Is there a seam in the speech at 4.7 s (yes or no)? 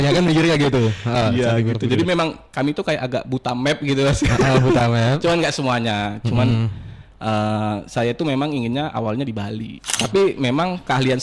no